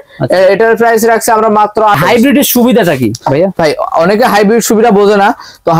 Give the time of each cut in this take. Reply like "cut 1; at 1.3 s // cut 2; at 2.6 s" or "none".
cut 1; at 2.0 s